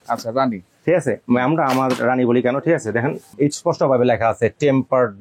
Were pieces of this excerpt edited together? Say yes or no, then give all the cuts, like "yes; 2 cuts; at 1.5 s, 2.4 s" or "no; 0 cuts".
yes; 1 cut; at 3.3 s